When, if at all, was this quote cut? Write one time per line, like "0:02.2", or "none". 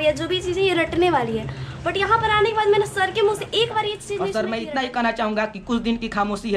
0:04.1